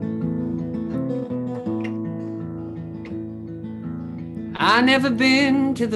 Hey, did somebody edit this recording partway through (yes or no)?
no